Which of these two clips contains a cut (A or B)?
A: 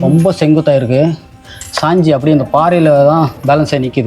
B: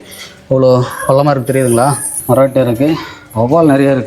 B